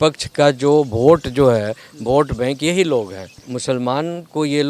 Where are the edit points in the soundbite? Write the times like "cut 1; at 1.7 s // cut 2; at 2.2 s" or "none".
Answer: cut 1; at 3.4 s